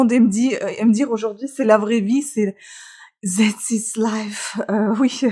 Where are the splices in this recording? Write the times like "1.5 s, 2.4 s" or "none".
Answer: none

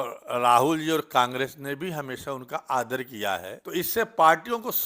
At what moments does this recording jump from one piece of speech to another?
3.9 s

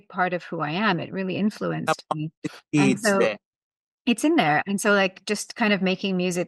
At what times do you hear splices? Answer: none

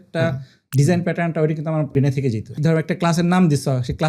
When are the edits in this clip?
2.0 s

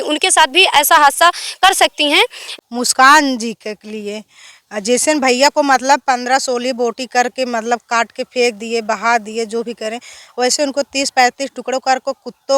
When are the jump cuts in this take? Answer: 2.4 s

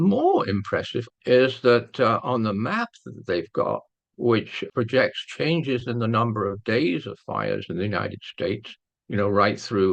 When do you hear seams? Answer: 1.0 s, 4.7 s

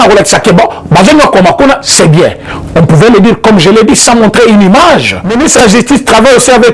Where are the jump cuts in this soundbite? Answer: 5.2 s

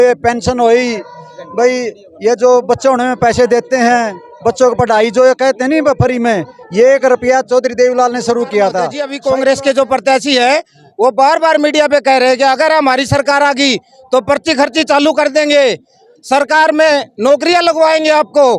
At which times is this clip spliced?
9.1 s

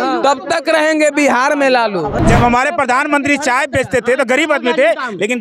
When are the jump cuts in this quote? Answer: 2.2 s

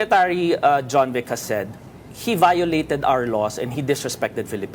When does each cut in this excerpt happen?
none

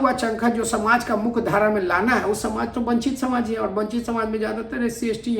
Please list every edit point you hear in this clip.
none

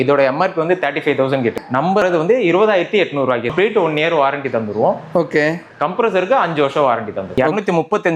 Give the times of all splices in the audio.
1.9 s, 3.5 s, 7.2 s

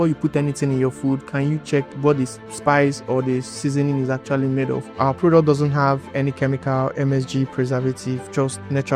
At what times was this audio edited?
1.9 s, 4.9 s

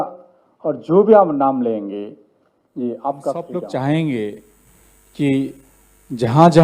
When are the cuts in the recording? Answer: 3.5 s

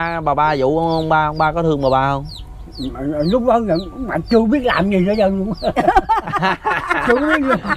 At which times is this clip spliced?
none

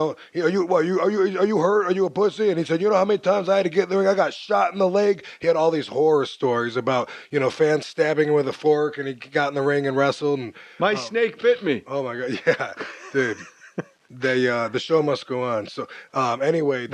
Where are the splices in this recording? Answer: 8.1 s

